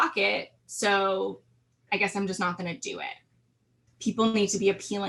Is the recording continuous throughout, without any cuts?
no; 1 cut; at 3.9 s

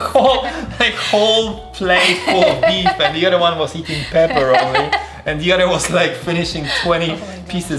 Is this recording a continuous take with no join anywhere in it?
yes; 0 cuts

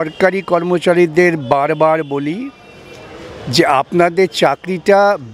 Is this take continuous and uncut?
yes; 0 cuts

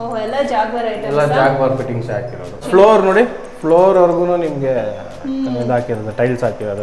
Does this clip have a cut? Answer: yes; 1 cut; at 2.6 s

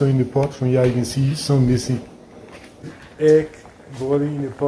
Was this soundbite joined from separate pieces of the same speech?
yes; 1 cut; at 2.9 s

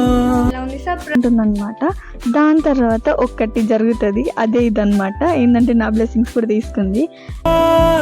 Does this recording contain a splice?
yes; 1 cut; at 1.1 s

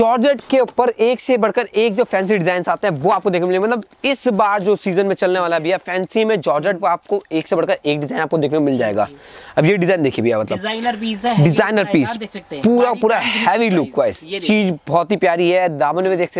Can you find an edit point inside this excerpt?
no; 0 cuts

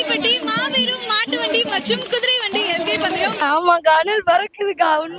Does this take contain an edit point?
yes; 1 cut; at 3.4 s

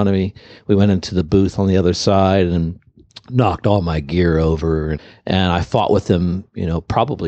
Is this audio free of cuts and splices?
no; 1 cut; at 5.0 s

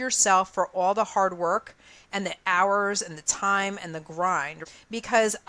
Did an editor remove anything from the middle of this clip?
yes; 1 cut; at 4.6 s

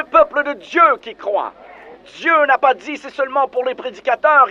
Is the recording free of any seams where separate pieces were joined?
yes; 0 cuts

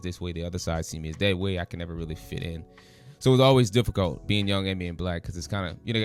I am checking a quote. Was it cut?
no; 0 cuts

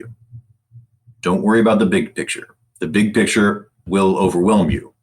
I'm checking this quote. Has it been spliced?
yes; 1 cut; at 3.8 s

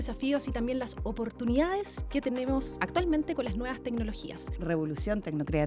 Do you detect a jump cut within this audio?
yes; 3 cuts; at 2.0 s, 2.8 s, 4.5 s

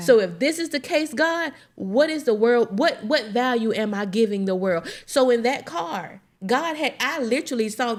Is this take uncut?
yes; 0 cuts

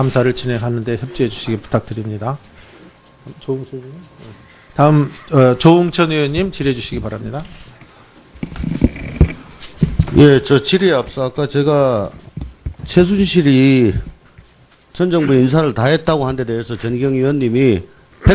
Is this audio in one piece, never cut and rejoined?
yes; 0 cuts

